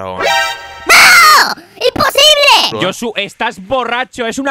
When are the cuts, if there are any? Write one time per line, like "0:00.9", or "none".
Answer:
0:02.7